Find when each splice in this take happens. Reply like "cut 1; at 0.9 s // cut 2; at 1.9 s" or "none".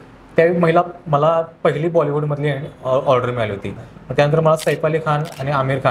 cut 1; at 3.9 s